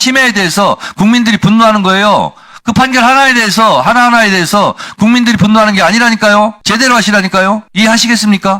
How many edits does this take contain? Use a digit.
2